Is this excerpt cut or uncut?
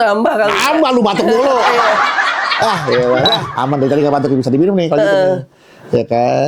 cut